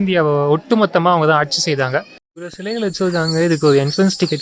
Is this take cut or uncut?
cut